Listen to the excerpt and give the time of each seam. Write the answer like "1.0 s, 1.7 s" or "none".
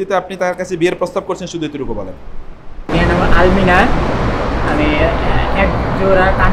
2.8 s